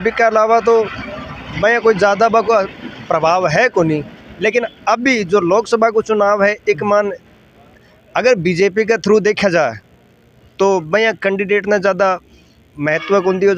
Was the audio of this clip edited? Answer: no; 0 cuts

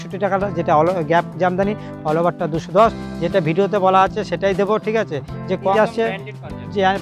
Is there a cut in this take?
yes; 1 cut; at 5.7 s

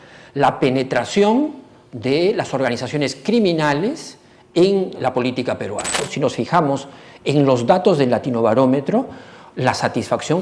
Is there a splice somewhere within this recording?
yes; 2 cuts; at 4.9 s, 6.1 s

